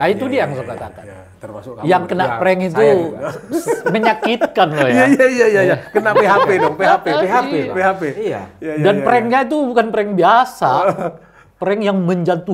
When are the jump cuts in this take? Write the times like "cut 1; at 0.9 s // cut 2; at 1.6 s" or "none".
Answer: none